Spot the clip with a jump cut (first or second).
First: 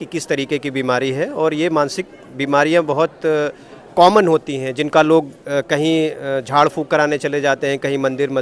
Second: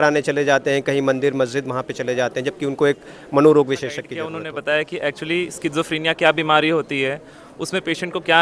second